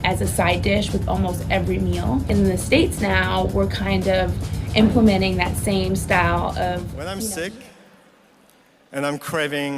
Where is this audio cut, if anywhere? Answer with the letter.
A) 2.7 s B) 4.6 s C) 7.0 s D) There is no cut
C